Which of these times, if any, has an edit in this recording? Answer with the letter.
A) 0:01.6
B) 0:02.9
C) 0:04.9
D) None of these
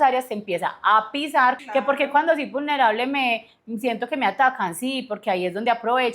A